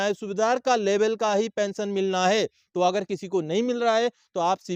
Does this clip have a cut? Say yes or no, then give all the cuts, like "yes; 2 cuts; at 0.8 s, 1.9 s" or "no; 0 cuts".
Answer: no; 0 cuts